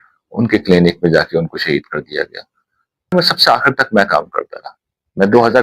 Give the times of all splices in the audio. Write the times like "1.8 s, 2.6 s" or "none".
3.1 s